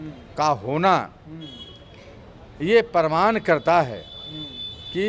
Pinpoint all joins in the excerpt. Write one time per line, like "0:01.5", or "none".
none